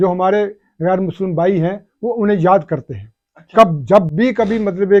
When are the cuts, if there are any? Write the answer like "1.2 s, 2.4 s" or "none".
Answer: none

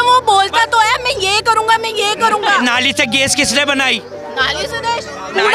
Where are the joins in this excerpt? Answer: 2.6 s, 4.4 s

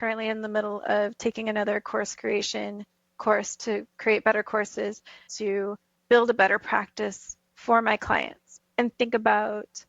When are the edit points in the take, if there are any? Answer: 5.3 s, 8.5 s

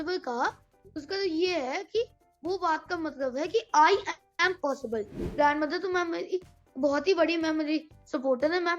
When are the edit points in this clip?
5.2 s

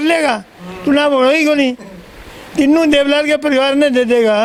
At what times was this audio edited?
none

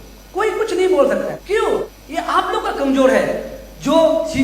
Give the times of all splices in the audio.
1.4 s, 2.0 s

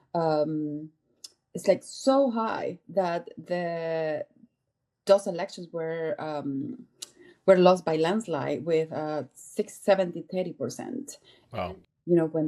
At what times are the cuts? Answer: 11.5 s

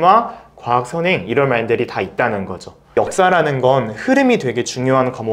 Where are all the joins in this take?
2.9 s

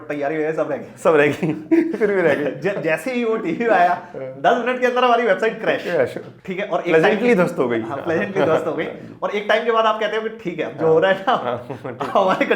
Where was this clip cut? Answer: 6.3 s

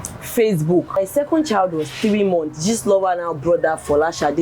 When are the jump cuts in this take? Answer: 1.0 s

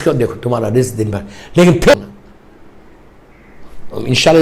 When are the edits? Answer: 1.9 s

